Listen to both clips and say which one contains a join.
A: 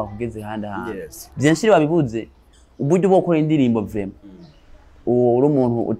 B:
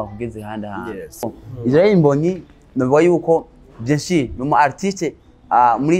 B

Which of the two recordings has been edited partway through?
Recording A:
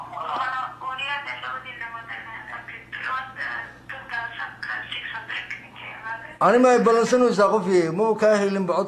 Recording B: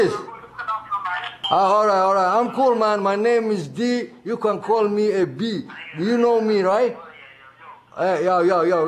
A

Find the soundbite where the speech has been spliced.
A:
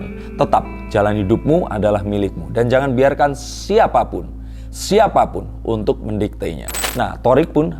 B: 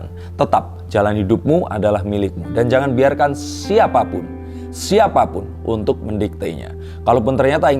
A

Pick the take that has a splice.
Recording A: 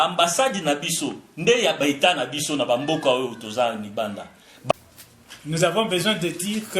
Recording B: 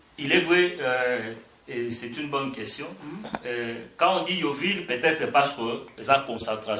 A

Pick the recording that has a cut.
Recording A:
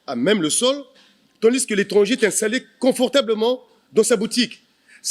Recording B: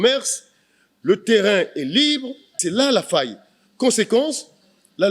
B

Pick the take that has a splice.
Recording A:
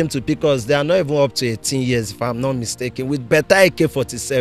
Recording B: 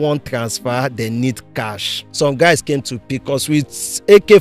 B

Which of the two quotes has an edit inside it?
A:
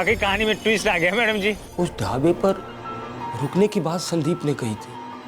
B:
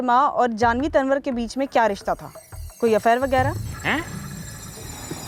A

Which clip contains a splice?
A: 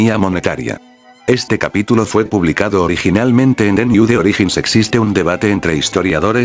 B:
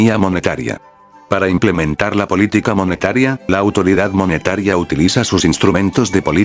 B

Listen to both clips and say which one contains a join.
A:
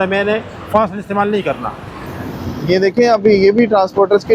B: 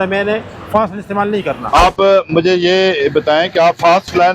B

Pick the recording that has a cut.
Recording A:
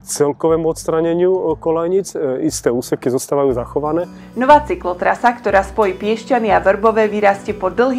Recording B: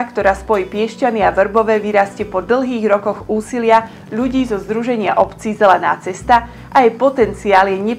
A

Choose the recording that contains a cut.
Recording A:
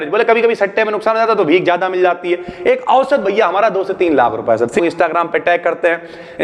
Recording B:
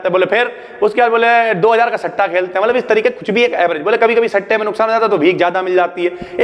A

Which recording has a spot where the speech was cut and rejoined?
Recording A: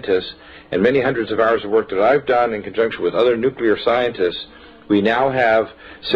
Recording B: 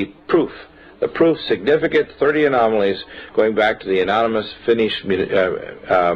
A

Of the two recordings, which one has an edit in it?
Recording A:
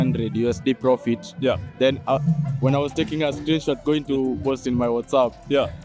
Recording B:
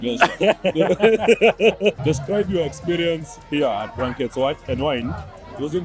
B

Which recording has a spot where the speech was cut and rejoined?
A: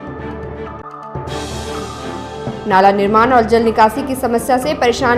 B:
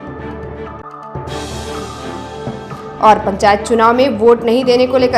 A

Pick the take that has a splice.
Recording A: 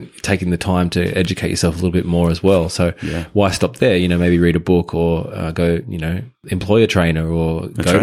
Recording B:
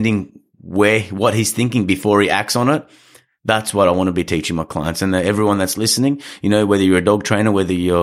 A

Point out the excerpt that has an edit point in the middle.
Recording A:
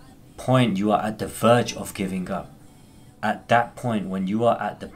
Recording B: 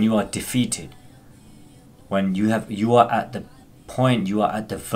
A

